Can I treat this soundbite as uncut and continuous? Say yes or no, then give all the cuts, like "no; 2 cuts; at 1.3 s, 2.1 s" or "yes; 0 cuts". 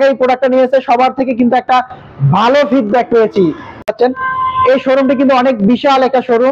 no; 1 cut; at 3.9 s